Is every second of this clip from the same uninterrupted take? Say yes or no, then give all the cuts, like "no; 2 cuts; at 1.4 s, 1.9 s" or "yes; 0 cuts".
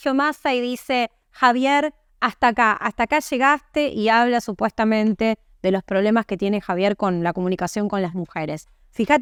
yes; 0 cuts